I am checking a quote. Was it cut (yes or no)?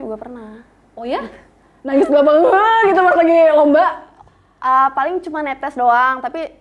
no